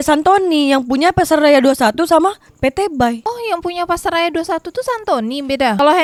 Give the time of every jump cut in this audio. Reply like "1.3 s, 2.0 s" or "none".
none